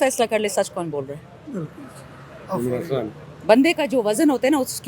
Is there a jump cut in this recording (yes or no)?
no